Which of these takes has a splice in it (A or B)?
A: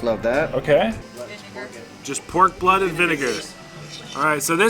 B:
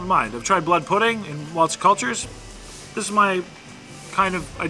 A